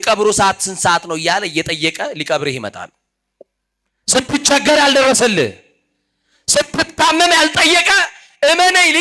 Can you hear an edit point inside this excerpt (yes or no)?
no